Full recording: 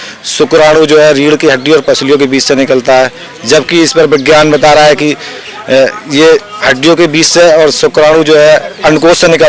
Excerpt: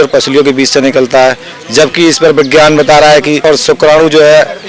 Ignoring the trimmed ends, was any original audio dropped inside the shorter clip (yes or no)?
yes